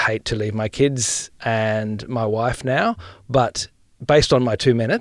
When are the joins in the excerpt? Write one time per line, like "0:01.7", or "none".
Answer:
0:01.3
0:03.9